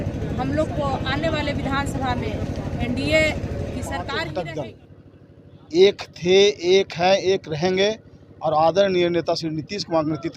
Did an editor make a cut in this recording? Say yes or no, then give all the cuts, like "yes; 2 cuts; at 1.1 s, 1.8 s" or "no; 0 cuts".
yes; 1 cut; at 4.0 s